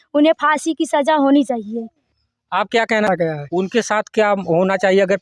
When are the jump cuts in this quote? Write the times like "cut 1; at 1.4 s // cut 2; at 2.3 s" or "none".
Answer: cut 1; at 3.1 s